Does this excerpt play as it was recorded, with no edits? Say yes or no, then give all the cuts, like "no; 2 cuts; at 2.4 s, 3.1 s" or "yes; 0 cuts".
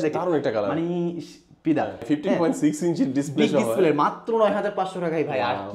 no; 1 cut; at 2.0 s